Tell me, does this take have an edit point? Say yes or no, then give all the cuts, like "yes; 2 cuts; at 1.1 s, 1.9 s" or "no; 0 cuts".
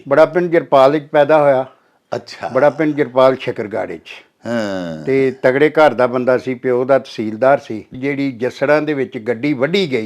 yes; 1 cut; at 7.9 s